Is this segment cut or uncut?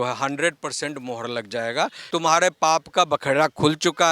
cut